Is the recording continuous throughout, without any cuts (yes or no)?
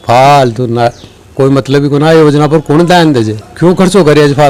yes